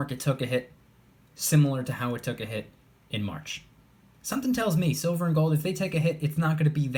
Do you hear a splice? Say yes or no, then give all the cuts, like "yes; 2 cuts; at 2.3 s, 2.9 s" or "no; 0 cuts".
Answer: no; 0 cuts